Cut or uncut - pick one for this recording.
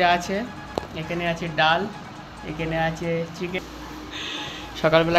cut